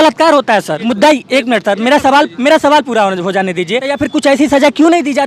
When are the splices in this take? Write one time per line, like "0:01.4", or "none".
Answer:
0:00.8
0:04.1